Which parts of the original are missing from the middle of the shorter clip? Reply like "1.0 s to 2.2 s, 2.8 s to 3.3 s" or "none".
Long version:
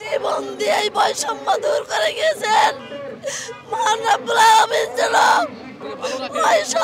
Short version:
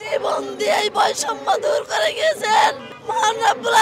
2.9 s to 3.5 s